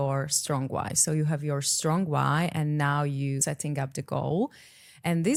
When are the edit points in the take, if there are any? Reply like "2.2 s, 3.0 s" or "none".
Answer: none